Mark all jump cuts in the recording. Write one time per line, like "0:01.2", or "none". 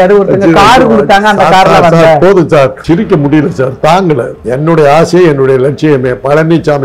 0:02.8
0:04.4

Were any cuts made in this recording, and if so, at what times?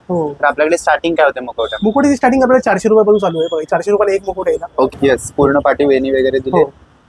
0:04.9

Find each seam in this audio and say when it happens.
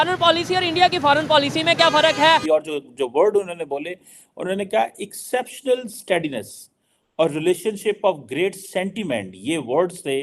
0:02.4

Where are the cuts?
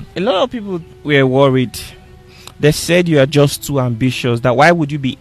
0:00.9

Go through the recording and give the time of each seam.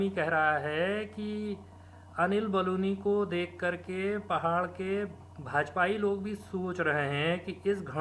none

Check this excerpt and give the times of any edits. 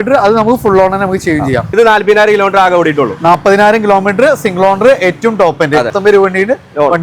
0:01.7
0:05.9

